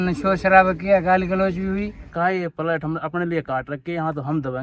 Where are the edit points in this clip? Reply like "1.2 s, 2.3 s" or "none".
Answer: 2.1 s